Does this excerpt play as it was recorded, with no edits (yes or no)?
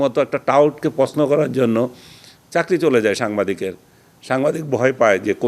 yes